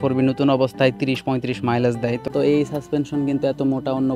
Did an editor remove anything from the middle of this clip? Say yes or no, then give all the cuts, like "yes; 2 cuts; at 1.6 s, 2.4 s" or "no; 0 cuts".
yes; 1 cut; at 2.3 s